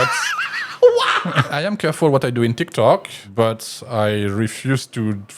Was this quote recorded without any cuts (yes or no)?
no